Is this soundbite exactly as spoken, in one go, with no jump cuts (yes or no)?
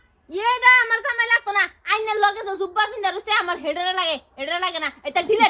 yes